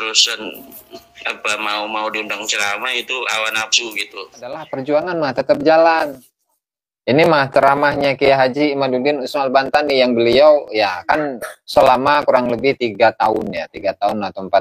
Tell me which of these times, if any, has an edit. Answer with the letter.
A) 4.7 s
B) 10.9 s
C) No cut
A